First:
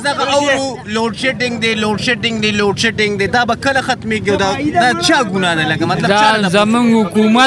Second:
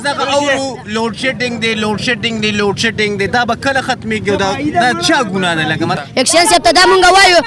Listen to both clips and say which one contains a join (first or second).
second